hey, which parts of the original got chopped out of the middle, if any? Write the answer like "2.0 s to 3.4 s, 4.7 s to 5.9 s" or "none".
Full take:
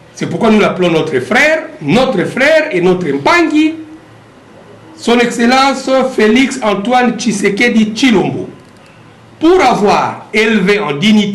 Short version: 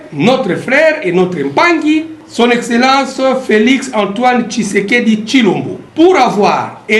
3.9 s to 4.9 s, 8.5 s to 9.2 s